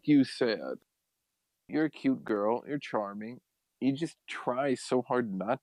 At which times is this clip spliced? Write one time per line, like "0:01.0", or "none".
none